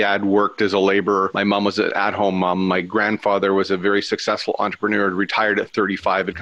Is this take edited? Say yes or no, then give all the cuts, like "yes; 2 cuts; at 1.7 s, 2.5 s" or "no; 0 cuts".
yes; 1 cut; at 1.3 s